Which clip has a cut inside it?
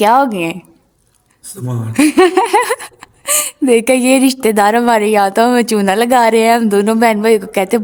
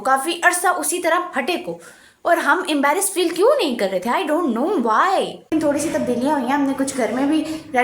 second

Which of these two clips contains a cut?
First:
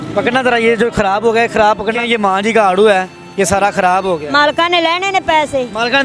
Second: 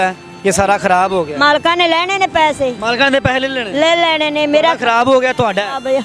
first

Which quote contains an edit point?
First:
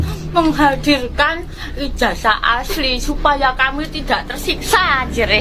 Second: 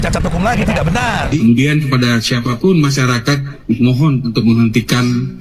second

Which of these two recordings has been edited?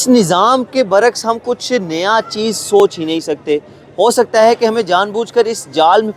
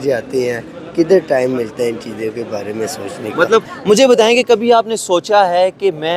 second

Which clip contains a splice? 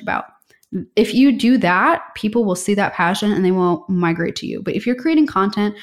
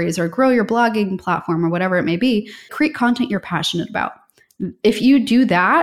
second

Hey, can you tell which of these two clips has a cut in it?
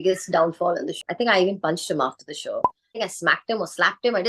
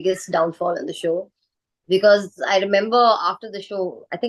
first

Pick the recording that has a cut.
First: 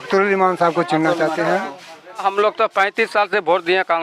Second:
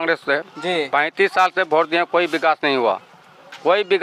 first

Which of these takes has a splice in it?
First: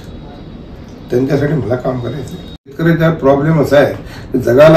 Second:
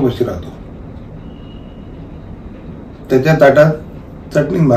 first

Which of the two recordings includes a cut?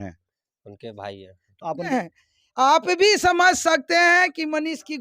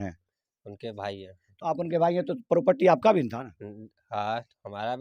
first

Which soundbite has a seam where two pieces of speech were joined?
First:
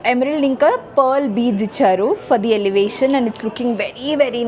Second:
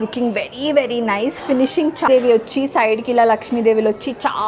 second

